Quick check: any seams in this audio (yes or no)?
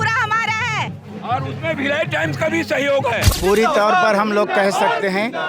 yes